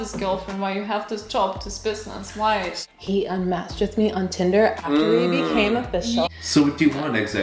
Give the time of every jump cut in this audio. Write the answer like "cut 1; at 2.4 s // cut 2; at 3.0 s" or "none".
cut 1; at 2.7 s // cut 2; at 6.3 s